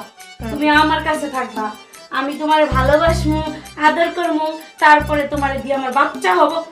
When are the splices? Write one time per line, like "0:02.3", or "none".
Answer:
none